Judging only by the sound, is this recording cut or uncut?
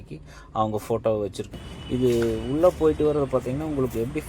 cut